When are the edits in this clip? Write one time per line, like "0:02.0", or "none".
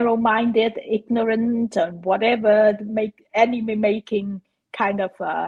none